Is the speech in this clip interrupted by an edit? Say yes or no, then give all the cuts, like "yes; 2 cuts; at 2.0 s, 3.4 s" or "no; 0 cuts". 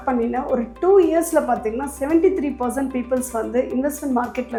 no; 0 cuts